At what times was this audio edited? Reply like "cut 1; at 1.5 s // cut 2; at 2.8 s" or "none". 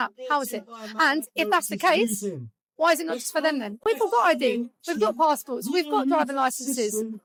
none